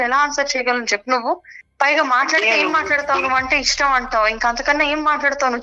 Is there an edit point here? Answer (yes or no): no